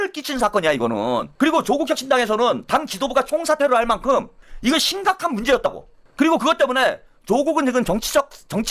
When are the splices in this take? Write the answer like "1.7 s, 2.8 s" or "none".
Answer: none